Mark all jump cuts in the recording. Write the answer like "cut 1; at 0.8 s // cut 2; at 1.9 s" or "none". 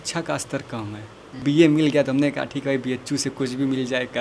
cut 1; at 1.4 s